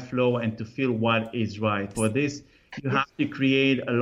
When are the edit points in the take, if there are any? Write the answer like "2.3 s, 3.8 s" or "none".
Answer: 1.9 s